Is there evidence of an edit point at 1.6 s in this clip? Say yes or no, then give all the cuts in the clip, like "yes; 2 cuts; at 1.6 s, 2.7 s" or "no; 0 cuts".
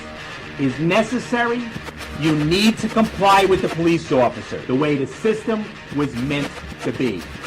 yes; 1 cut; at 1.6 s